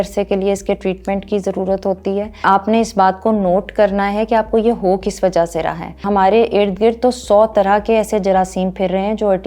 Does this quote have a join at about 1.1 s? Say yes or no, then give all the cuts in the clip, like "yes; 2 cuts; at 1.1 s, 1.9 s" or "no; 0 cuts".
no; 2 cuts; at 2.4 s, 6.0 s